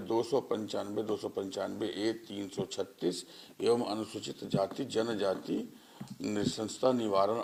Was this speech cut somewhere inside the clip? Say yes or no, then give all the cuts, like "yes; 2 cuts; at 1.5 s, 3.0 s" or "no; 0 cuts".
no; 0 cuts